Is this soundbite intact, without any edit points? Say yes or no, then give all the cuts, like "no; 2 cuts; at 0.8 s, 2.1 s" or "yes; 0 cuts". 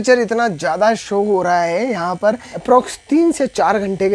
no; 1 cut; at 2.5 s